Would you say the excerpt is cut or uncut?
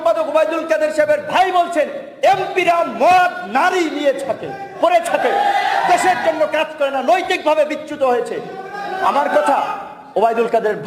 uncut